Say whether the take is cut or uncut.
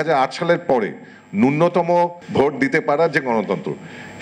cut